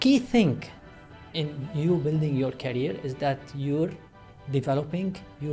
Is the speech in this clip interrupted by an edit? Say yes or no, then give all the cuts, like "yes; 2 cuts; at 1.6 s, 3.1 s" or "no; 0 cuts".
no; 0 cuts